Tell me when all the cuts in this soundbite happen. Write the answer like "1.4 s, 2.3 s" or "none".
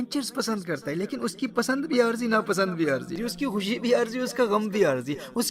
3.2 s